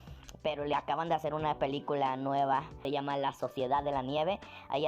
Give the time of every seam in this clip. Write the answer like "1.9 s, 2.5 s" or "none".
2.8 s